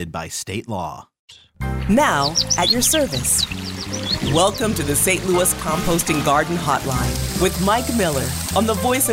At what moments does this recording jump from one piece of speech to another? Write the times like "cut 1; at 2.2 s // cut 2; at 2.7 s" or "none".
cut 1; at 1.4 s